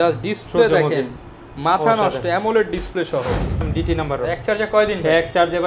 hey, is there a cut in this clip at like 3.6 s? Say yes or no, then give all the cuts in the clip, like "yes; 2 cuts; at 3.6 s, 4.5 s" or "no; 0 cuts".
yes; 1 cut; at 3.6 s